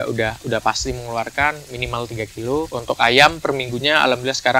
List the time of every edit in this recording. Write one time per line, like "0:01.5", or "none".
0:02.7